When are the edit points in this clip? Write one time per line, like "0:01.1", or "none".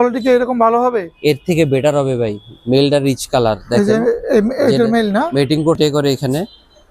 0:05.8

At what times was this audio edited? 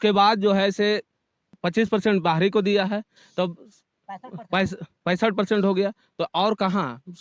0:01.5

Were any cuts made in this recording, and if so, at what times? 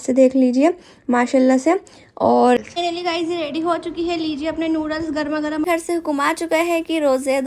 0:02.6
0:05.7

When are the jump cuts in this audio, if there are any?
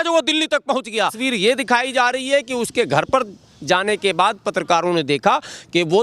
0:01.1

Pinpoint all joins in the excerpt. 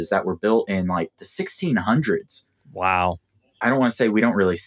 0:03.1

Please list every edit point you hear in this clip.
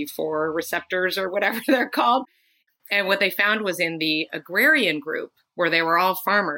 0:02.5

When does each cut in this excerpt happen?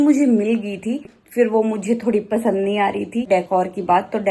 0:01.2
0:03.3

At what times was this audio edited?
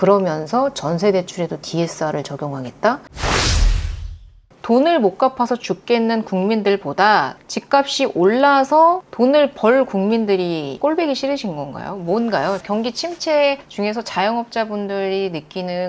0:03.2
0:04.5
0:10.7
0:12.6

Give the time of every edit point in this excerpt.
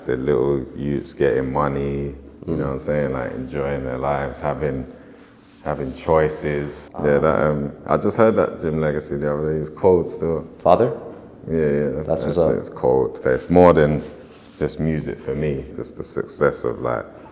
0:07.0
0:13.2
0:15.7

